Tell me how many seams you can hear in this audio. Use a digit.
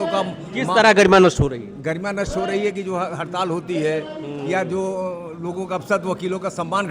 0